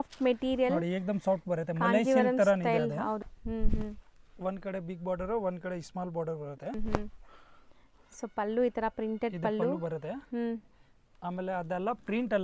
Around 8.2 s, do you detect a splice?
no; 2 cuts; at 3.3 s, 6.8 s

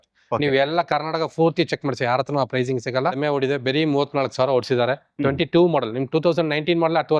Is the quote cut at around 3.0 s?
yes; 1 cut; at 3.0 s

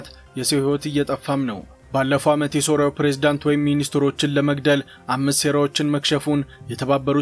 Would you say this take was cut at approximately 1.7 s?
yes; 1 cut; at 1.7 s

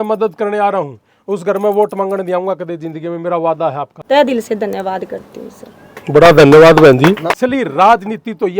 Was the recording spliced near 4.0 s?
yes; 2 cuts; at 4.0 s, 7.3 s

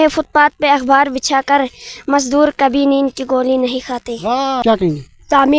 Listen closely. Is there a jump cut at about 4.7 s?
yes; 1 cut; at 4.7 s

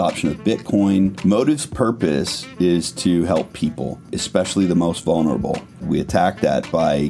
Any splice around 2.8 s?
no; 3 cuts; at 1.2 s, 4.2 s, 5.8 s

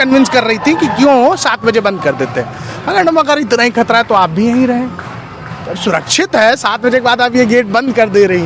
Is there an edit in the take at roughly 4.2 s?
no; 0 cuts

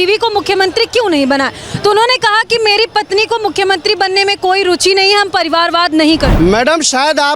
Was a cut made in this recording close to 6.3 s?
yes; 1 cut; at 6.3 s

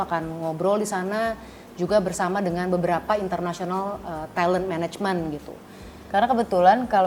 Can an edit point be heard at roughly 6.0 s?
yes; 1 cut; at 6.0 s

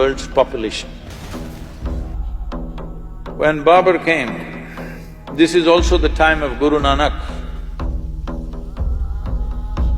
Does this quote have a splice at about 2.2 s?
yes; 1 cut; at 2.2 s

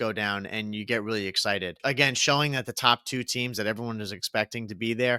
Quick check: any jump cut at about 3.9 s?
no; 1 cut; at 1.7 s

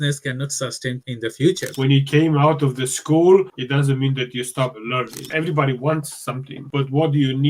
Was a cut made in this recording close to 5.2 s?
yes; 2 cuts; at 1.7 s, 5.2 s

